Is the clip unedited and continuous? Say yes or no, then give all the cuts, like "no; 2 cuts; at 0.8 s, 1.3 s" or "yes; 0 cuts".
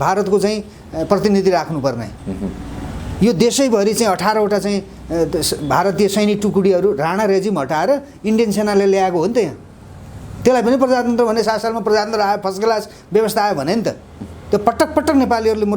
yes; 0 cuts